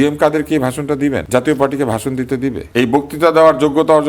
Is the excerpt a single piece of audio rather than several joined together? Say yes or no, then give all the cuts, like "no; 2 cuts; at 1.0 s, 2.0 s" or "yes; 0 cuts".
no; 2 cuts; at 1.2 s, 2.6 s